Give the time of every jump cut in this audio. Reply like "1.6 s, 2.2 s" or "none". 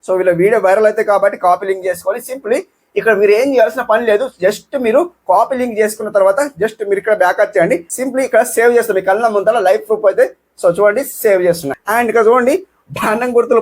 7.9 s, 11.7 s